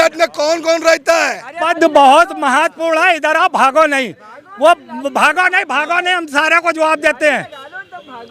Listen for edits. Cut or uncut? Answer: cut